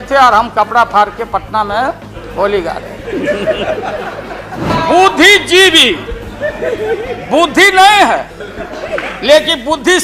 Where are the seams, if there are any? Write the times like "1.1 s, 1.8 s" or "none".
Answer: 4.7 s